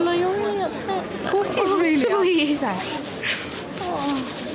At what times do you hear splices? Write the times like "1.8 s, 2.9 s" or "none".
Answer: none